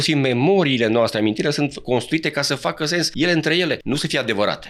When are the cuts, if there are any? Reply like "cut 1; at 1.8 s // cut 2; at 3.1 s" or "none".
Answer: cut 1; at 3.1 s // cut 2; at 3.8 s